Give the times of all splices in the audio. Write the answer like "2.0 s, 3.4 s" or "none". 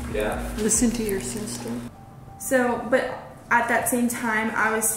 1.9 s